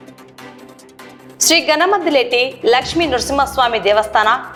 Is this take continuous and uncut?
yes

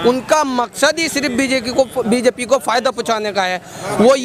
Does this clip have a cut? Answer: no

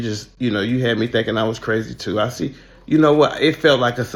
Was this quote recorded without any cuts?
yes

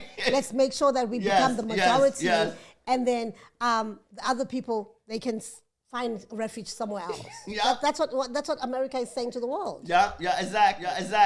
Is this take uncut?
yes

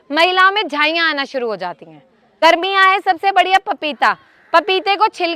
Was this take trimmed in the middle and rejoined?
yes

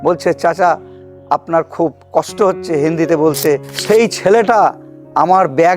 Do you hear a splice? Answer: yes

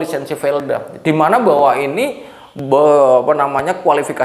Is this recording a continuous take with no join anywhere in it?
yes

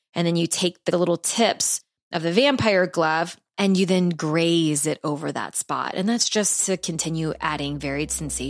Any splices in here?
yes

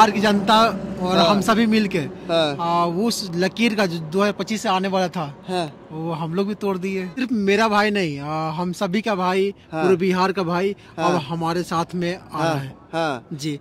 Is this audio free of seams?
no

